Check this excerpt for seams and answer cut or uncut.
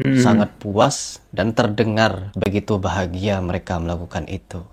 uncut